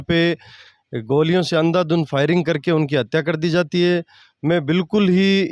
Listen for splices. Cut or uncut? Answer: uncut